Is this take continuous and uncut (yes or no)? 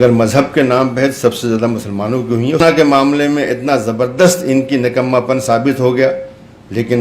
no